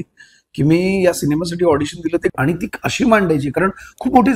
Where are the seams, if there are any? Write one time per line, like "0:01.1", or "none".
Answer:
0:02.3

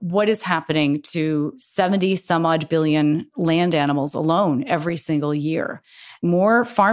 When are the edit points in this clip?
0:01.6
0:03.3
0:06.2

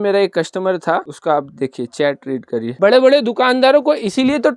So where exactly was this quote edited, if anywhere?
0:02.8

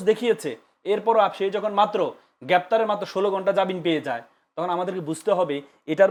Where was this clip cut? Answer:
none

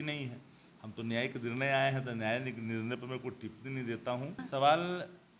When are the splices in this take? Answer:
0:04.4

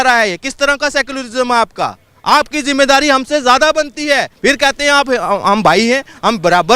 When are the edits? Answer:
0:04.3

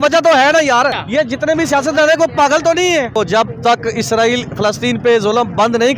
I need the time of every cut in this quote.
0:01.0
0:03.1

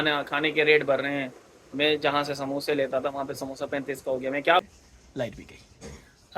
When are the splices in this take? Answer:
0:04.6

